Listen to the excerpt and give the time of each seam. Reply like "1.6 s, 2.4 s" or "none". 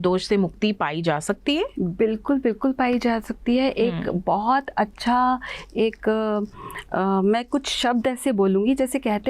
none